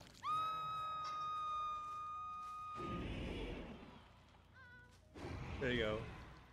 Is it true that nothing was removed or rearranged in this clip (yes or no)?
yes